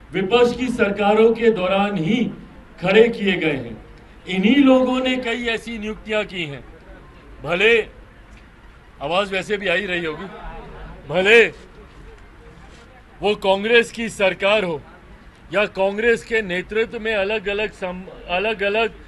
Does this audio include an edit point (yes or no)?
no